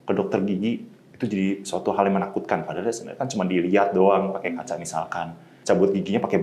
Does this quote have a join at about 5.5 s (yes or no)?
yes